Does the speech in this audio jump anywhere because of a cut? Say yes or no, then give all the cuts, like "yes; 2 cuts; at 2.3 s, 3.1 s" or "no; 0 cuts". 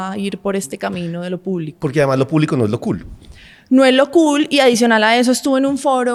no; 0 cuts